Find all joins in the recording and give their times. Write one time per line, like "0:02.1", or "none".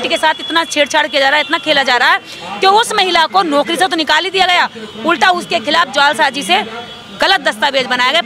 none